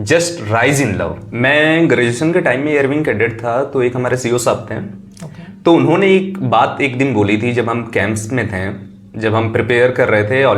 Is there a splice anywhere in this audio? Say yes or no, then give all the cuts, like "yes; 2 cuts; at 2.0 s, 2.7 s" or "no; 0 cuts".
yes; 1 cut; at 1.2 s